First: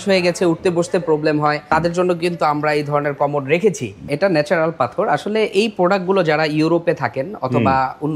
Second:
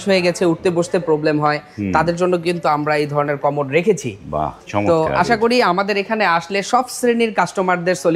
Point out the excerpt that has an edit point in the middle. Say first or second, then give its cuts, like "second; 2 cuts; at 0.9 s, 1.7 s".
first; 2 cuts; at 1.6 s, 4.0 s